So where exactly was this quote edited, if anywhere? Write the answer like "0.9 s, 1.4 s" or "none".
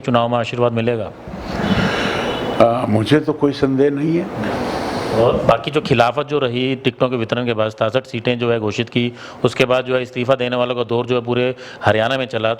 none